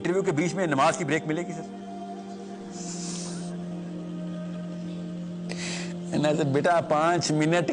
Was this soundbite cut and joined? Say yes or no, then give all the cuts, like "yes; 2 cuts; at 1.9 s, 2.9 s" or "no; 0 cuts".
no; 0 cuts